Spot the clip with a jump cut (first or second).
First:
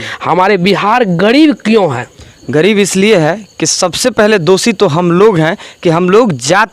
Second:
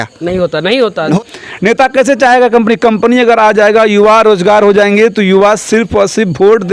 second